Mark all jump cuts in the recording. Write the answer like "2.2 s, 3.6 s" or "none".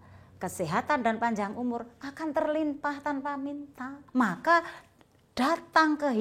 4.0 s